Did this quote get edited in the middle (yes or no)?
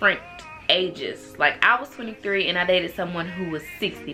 no